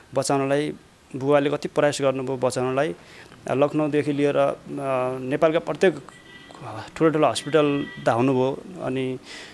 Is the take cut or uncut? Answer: uncut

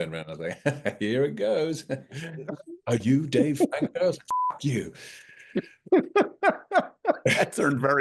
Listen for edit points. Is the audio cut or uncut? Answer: uncut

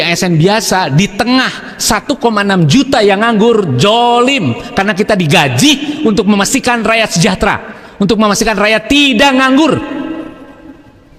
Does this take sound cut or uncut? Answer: uncut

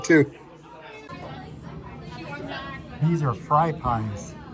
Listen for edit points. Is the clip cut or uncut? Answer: cut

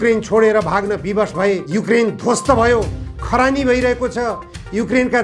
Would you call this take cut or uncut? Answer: cut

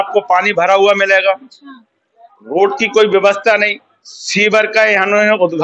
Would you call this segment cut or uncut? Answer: uncut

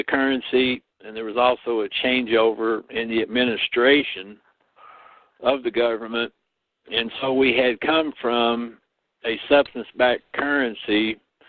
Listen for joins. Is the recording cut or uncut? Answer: cut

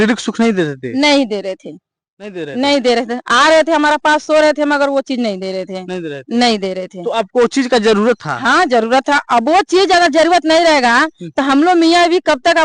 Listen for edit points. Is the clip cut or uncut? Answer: uncut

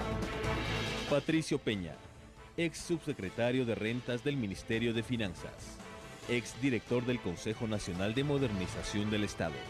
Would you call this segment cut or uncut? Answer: cut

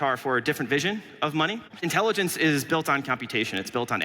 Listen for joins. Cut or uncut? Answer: cut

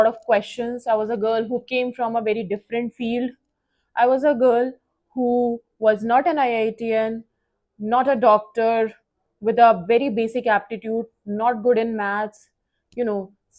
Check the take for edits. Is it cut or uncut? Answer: uncut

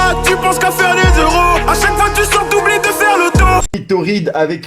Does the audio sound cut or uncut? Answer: cut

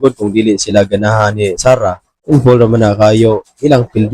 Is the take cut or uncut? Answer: cut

